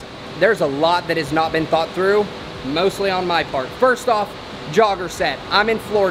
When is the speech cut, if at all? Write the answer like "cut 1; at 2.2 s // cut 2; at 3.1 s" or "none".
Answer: none